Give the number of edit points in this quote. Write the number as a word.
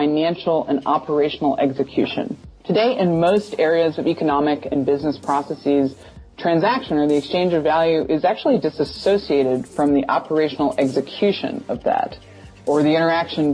one